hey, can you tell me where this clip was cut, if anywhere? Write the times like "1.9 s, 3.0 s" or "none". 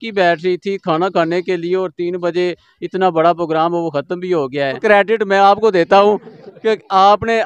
4.8 s